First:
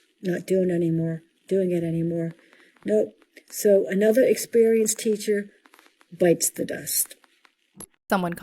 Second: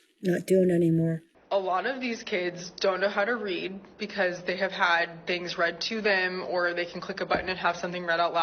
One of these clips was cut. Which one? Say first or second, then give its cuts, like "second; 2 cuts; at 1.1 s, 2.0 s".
second; 1 cut; at 1.3 s